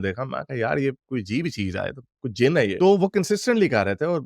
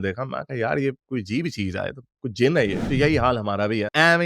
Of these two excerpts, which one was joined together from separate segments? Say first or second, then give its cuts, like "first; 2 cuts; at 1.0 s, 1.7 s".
second; 1 cut; at 2.7 s